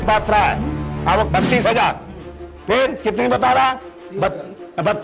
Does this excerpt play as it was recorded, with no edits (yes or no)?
no